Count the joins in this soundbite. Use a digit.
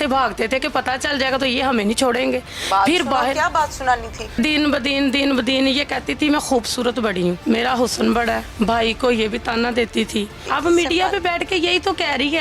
4